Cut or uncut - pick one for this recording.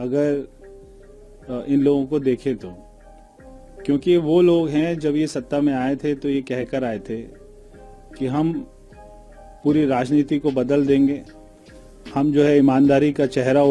uncut